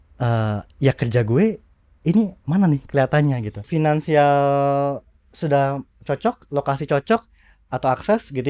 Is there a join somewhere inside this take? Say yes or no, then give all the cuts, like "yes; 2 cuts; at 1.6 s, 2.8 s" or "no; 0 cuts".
yes; 1 cut; at 3.7 s